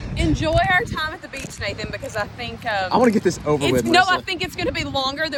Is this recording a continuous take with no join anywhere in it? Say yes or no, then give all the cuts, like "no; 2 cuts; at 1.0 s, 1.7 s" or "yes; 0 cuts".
yes; 0 cuts